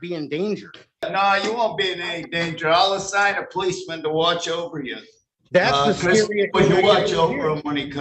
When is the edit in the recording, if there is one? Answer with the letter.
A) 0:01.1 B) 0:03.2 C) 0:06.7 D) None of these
A